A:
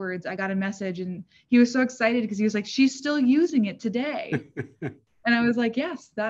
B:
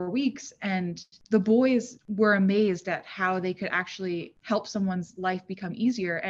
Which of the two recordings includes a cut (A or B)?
B